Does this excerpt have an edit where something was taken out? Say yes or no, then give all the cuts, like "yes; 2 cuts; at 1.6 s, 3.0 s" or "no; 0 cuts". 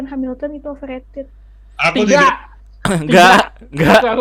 no; 0 cuts